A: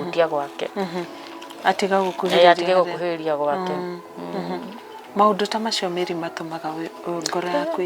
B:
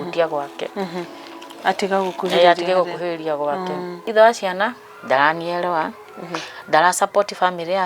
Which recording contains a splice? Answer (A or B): B